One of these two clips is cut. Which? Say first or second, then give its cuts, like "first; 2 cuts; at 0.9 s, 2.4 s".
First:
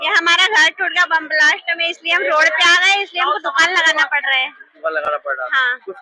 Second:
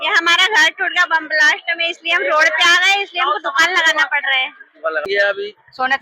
second; 1 cut; at 5.1 s